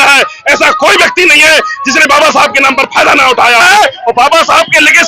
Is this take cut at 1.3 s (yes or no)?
no